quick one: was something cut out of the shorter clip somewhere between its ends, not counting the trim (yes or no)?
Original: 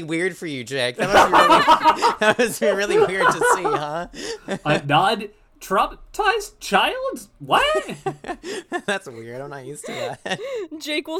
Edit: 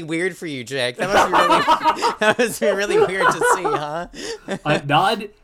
no